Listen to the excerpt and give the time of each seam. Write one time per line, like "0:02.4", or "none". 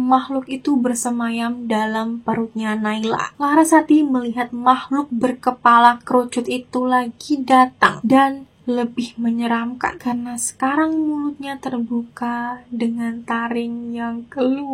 0:03.3

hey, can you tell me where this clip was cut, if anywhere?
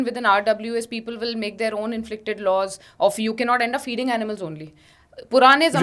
none

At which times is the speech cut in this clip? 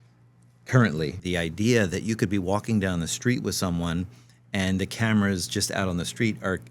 0:01.2

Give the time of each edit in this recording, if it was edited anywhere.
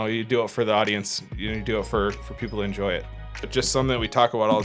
0:03.1

